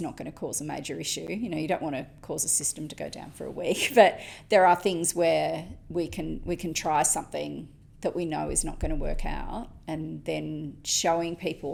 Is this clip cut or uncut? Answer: uncut